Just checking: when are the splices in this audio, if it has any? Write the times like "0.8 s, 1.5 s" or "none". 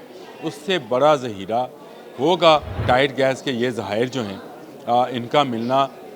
2.8 s